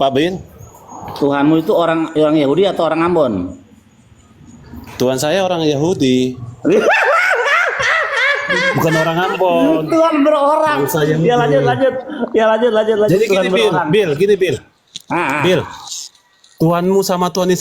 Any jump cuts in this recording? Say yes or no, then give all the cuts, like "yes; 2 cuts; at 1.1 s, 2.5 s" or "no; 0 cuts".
no; 0 cuts